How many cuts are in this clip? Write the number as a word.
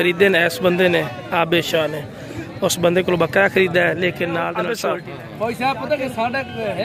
one